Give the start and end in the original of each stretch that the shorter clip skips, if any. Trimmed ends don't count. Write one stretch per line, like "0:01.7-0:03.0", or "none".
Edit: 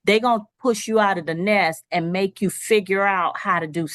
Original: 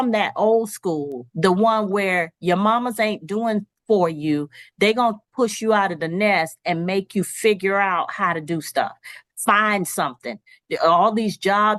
none